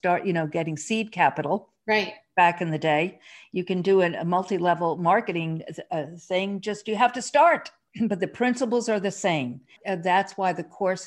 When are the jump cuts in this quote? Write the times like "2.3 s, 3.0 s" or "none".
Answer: 7.8 s, 9.8 s